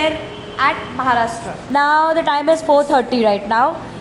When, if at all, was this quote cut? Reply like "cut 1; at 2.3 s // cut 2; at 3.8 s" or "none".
cut 1; at 1.5 s